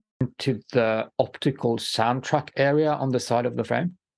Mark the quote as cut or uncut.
uncut